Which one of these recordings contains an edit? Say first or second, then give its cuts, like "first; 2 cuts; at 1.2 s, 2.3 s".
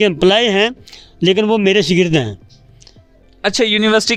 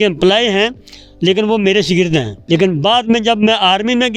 second; 1 cut; at 2.3 s